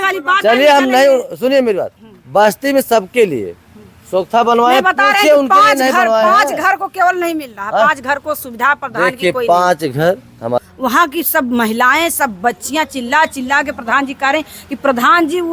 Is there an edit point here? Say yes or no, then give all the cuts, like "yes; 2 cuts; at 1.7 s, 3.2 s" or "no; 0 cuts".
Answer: yes; 1 cut; at 10.6 s